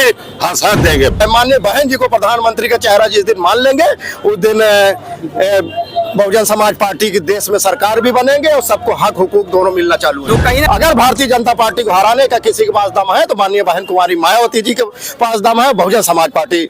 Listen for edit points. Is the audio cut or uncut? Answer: cut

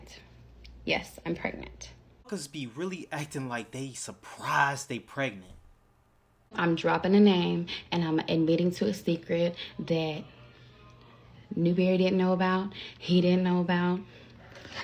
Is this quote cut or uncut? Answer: cut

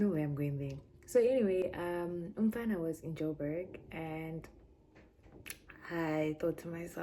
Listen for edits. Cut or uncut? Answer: uncut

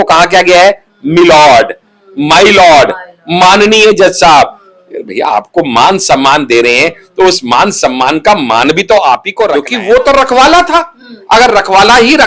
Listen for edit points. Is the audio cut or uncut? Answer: cut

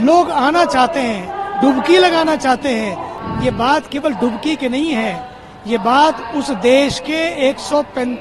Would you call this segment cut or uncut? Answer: cut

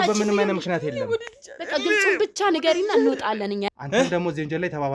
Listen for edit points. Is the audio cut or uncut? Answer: cut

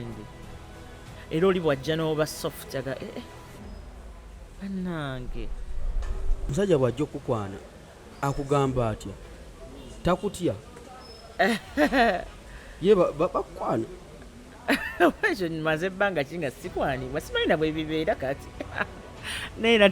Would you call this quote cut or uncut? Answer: cut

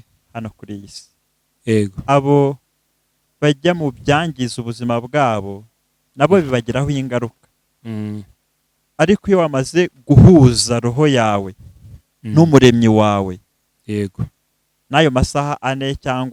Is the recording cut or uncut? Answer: uncut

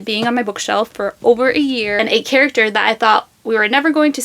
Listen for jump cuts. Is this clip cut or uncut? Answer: cut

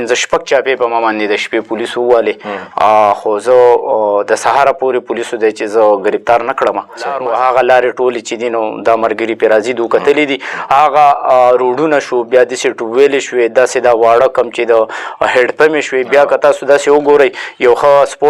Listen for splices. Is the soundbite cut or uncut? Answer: cut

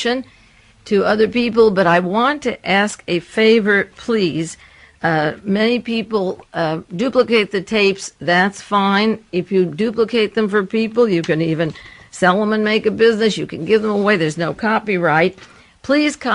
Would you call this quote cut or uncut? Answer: cut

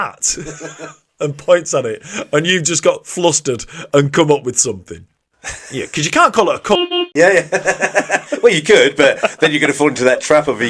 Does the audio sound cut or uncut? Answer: uncut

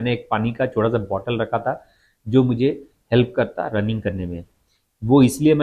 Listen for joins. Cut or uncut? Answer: uncut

